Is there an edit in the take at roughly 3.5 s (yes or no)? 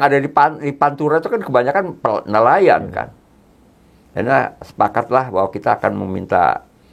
no